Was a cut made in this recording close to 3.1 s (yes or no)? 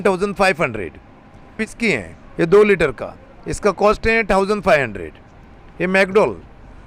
no